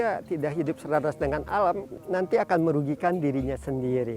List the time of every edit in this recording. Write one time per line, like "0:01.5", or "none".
none